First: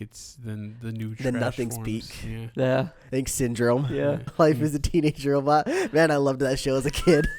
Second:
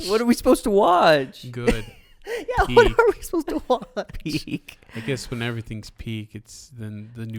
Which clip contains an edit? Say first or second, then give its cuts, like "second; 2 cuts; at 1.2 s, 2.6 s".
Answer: first; 1 cut; at 4.3 s